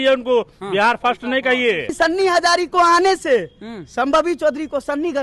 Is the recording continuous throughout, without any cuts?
no; 1 cut; at 1.9 s

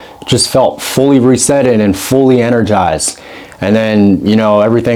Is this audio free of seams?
yes; 0 cuts

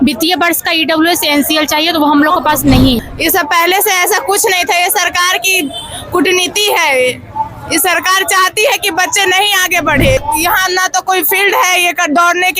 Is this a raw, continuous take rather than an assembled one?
no; 2 cuts; at 3.1 s, 10.2 s

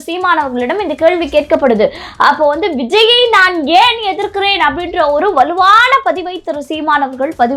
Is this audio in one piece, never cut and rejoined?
yes; 0 cuts

